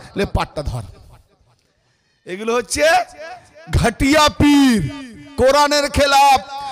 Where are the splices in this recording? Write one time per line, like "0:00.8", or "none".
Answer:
none